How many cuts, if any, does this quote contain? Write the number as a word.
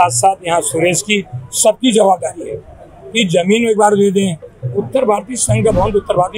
zero